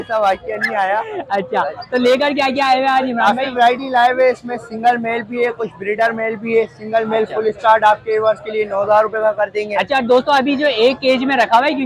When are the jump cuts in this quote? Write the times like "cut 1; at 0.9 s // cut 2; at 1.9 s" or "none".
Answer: none